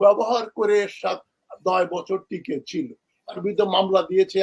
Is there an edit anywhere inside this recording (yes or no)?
yes